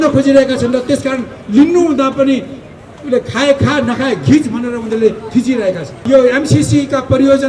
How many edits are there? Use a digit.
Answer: 1